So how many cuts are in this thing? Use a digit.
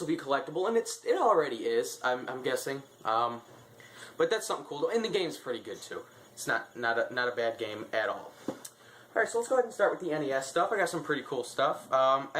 1